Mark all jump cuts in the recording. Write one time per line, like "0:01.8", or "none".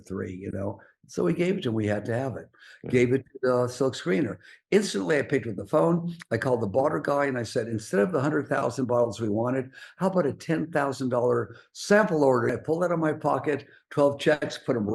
0:12.6